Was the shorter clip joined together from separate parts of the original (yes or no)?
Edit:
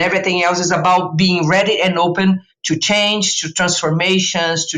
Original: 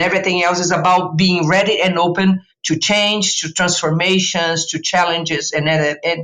no